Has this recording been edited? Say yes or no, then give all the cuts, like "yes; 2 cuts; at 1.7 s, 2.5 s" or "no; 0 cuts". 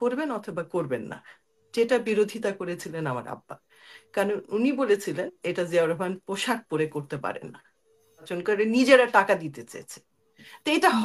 yes; 1 cut; at 8.3 s